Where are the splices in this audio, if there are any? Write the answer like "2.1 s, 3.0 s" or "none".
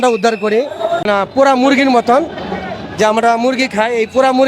1.0 s